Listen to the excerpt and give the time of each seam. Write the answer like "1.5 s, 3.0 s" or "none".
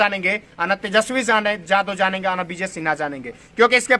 none